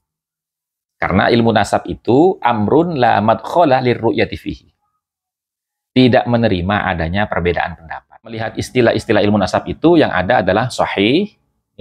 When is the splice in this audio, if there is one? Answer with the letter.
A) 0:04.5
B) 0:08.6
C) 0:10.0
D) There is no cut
B